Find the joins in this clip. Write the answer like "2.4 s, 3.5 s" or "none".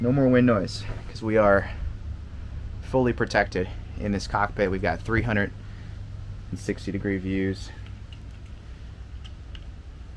none